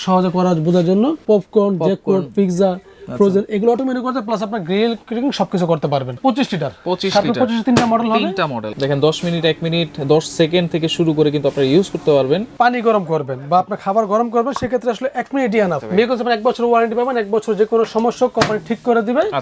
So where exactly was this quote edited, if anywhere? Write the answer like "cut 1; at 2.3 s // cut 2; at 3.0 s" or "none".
cut 1; at 1.2 s // cut 2; at 6.2 s // cut 3; at 8.6 s // cut 4; at 12.5 s // cut 5; at 15.8 s